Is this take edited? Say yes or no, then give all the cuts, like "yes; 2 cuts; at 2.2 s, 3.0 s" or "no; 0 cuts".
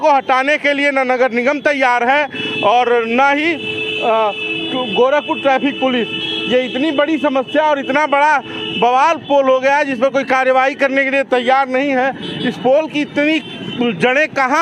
no; 0 cuts